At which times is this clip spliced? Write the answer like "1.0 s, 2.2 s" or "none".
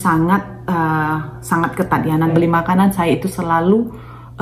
2.3 s